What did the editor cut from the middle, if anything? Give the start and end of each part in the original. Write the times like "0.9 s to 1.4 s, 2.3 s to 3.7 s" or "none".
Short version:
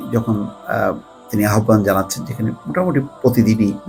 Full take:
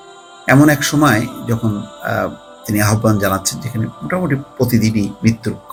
none